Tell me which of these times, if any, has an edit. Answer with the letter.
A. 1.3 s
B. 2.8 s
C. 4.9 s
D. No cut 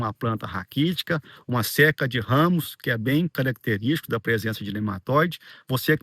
D